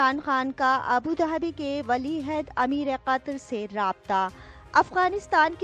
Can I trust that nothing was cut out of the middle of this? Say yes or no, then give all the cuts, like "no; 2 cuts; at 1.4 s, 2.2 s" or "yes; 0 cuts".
yes; 0 cuts